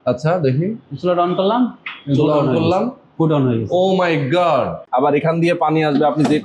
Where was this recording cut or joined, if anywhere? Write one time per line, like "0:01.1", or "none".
0:04.8